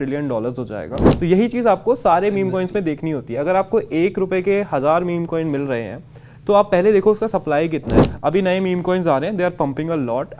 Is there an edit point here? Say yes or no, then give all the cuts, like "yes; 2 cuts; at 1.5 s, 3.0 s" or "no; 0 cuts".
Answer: yes; 2 cuts; at 1.0 s, 7.9 s